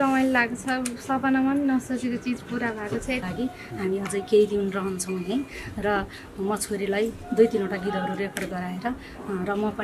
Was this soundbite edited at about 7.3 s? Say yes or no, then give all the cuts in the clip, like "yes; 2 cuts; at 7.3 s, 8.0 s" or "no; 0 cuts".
no; 1 cut; at 3.3 s